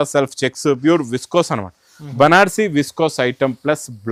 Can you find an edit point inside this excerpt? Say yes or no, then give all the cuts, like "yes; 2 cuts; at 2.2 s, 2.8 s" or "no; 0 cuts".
no; 0 cuts